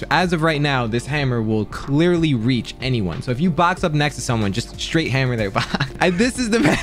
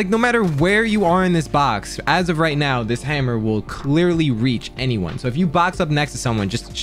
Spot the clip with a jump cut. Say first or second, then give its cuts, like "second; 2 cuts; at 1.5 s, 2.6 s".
first; 1 cut; at 5.9 s